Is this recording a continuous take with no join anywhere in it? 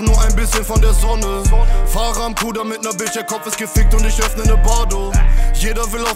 yes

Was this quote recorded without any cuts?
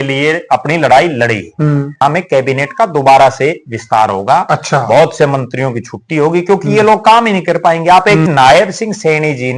no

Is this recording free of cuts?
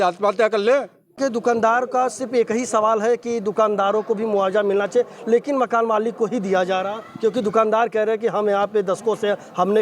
no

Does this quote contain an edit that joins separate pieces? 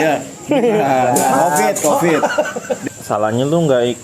yes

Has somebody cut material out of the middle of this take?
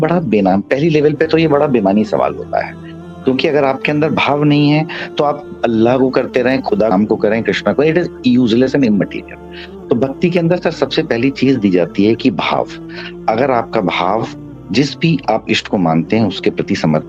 no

